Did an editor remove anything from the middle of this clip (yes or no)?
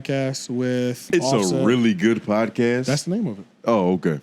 yes